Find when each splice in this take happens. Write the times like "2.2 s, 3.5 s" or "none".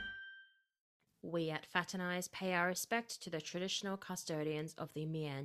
1.1 s